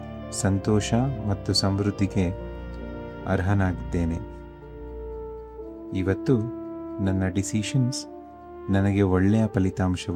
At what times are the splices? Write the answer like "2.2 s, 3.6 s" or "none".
none